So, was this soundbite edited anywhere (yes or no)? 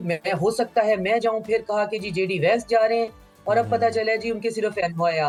no